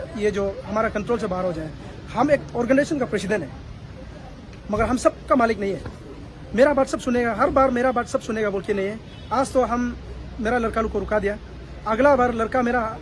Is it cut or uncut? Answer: uncut